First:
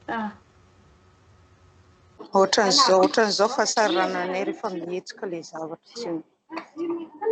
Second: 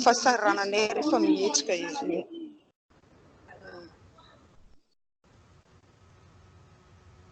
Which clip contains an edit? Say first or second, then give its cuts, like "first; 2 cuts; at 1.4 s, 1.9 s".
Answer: first; 1 cut; at 2.3 s